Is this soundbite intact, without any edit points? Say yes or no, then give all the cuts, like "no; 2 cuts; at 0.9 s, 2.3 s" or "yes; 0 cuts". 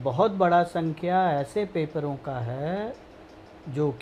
yes; 0 cuts